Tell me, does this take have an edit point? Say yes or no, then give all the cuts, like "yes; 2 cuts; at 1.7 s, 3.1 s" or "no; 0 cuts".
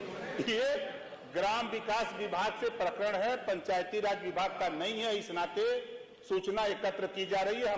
no; 0 cuts